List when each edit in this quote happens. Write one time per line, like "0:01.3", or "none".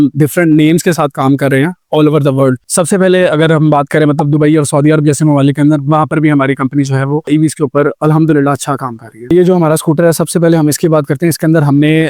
0:09.3